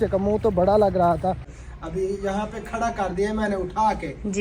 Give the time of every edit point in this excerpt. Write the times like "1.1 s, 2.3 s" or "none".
1.5 s